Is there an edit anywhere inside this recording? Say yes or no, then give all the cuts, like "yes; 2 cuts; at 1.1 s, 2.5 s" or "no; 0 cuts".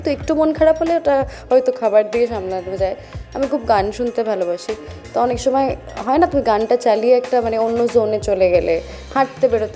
no; 0 cuts